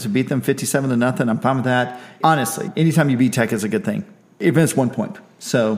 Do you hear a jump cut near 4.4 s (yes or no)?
yes